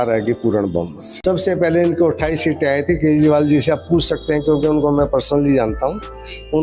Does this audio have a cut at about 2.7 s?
no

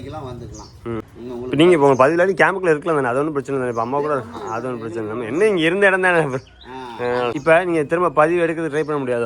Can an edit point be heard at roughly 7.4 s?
yes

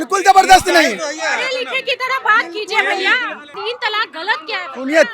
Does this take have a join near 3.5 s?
yes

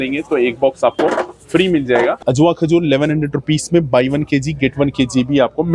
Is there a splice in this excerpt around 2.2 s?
yes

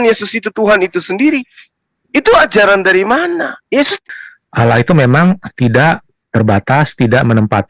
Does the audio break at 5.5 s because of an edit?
no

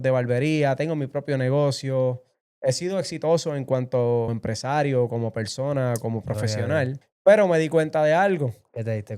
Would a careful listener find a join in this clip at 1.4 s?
no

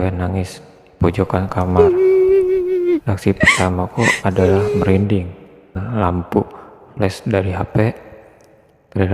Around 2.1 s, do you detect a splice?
no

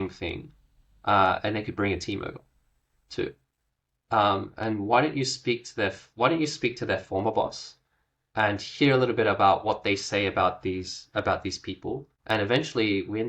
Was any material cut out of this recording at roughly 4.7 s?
no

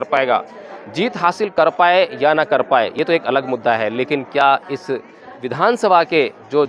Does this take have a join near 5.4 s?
yes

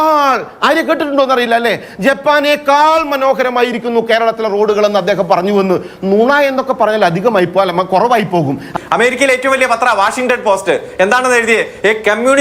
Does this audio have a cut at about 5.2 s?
no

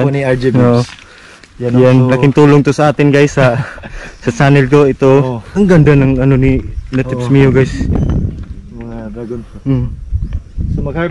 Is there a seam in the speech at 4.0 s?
no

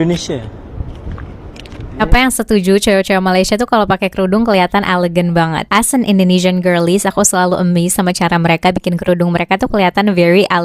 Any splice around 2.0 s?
yes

